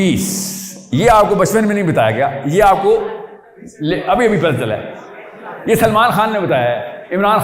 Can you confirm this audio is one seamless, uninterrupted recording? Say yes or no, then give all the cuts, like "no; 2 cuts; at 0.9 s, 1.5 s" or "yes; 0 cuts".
yes; 0 cuts